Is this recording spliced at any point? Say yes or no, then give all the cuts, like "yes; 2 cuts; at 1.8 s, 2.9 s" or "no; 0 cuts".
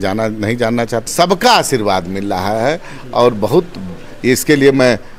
yes; 1 cut; at 1.0 s